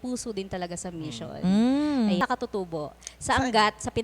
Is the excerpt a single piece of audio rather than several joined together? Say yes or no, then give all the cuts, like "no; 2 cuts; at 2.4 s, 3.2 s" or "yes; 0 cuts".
no; 1 cut; at 2.2 s